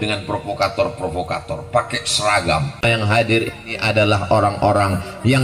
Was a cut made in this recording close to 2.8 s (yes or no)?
yes